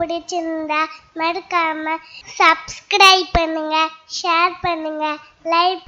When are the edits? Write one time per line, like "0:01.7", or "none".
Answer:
none